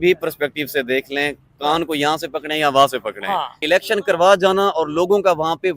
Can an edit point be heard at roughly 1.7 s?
no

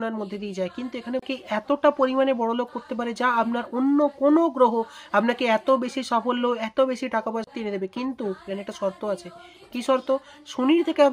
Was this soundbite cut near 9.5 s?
no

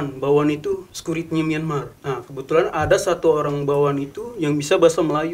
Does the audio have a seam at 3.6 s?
no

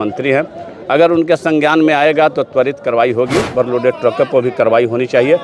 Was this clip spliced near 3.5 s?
yes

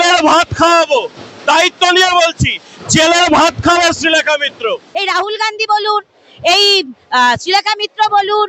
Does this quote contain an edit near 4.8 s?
yes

